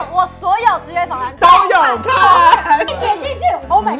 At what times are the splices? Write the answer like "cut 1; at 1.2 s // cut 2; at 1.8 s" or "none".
cut 1; at 2.9 s